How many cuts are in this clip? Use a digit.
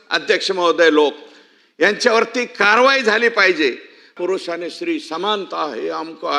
1